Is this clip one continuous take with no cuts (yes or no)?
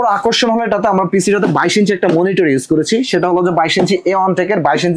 yes